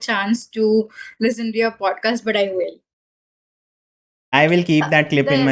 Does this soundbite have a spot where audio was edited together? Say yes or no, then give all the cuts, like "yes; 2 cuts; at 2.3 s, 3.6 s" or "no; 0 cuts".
no; 0 cuts